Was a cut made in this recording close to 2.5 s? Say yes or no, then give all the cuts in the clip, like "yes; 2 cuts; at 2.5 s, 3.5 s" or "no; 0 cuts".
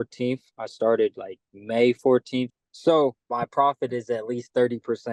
yes; 1 cut; at 2.5 s